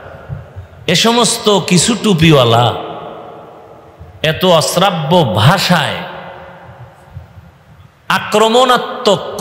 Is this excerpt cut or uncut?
uncut